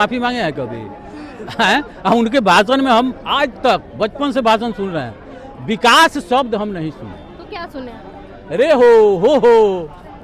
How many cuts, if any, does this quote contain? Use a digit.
0